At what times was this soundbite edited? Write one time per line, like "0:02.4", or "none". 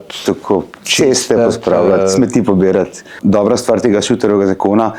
0:03.1